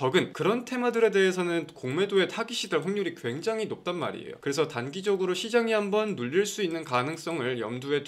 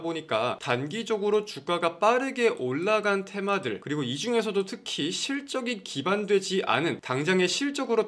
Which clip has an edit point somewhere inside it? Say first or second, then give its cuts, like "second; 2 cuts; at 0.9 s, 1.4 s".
second; 1 cut; at 7.0 s